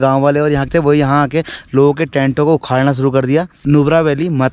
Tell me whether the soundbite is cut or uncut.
cut